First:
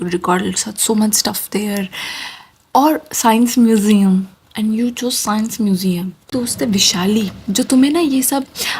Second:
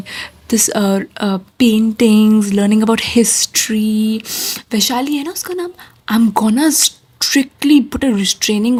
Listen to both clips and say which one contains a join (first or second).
first